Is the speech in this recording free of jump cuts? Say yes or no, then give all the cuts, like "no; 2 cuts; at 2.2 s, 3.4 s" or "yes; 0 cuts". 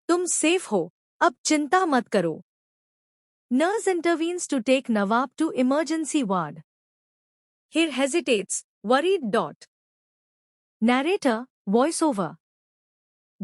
no; 1 cut; at 2.1 s